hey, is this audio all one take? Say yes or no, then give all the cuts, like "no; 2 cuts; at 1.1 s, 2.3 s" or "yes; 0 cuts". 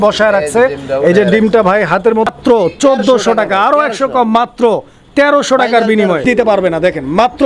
no; 2 cuts; at 2.3 s, 6.2 s